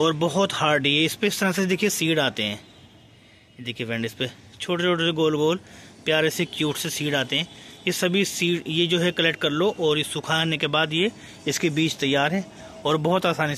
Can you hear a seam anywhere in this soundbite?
no; 0 cuts

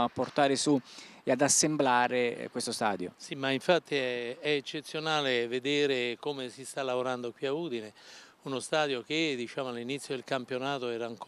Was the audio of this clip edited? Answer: no; 0 cuts

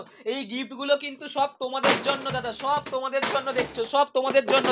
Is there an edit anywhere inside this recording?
no; 0 cuts

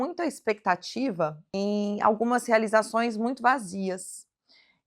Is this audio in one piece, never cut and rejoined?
no; 1 cut; at 1.4 s

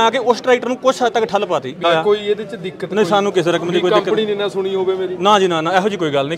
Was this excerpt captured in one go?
no; 1 cut; at 1.8 s

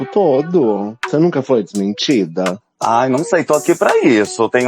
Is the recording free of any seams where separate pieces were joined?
no; 2 cuts; at 1.1 s, 2.7 s

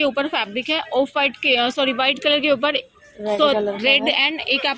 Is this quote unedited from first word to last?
yes; 0 cuts

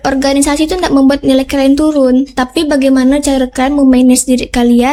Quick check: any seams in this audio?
no; 0 cuts

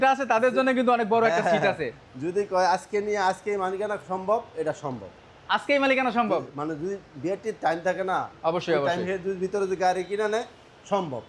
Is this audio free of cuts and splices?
yes; 0 cuts

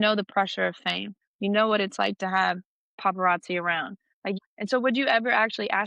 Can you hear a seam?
yes; 2 cuts; at 2.9 s, 4.4 s

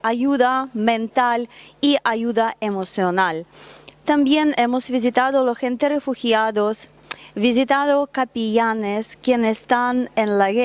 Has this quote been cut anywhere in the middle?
no; 0 cuts

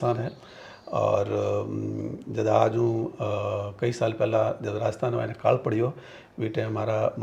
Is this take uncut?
yes; 0 cuts

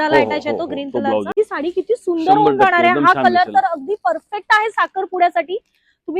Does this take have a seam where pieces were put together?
yes; 1 cut; at 1.3 s

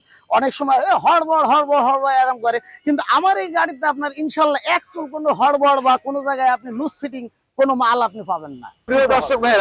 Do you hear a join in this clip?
no; 0 cuts

